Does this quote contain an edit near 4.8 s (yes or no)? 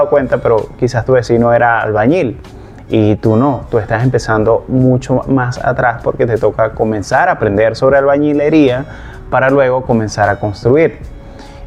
no